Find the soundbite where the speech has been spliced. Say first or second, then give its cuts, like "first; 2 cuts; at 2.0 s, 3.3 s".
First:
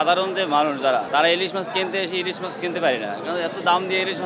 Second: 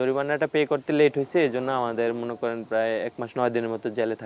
first; 1 cut; at 1.1 s